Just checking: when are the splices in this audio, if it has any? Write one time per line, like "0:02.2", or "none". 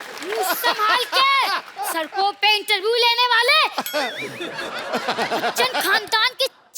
0:01.7